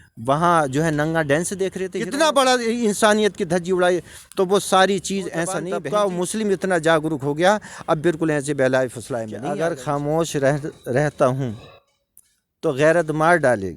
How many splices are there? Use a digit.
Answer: 3